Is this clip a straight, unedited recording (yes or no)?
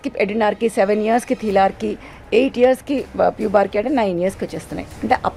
yes